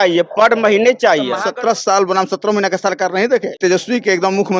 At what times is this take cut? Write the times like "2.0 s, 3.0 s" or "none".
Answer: 1.4 s, 3.6 s